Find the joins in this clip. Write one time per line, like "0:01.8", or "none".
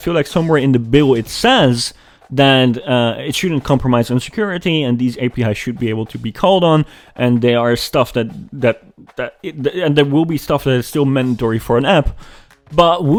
none